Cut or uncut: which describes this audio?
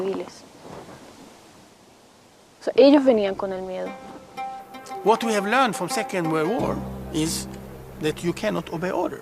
cut